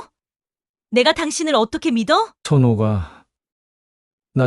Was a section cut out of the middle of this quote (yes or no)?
yes